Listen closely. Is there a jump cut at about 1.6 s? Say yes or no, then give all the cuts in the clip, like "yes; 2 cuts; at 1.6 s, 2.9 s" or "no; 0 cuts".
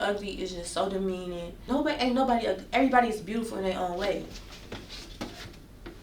yes; 1 cut; at 1.6 s